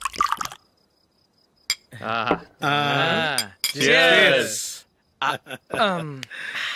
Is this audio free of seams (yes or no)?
yes